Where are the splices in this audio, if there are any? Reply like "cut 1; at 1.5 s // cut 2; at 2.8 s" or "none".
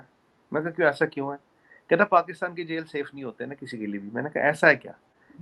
none